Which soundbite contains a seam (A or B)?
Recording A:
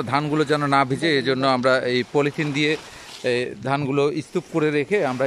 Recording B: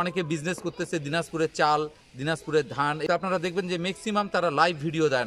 B